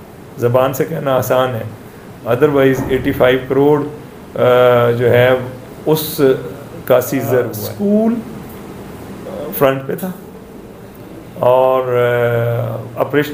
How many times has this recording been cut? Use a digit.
1